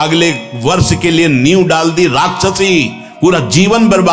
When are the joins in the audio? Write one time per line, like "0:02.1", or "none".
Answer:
none